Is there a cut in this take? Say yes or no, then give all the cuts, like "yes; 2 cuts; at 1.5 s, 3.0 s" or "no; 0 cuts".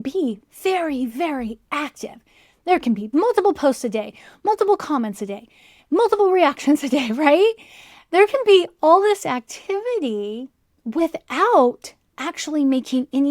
yes; 1 cut; at 3.0 s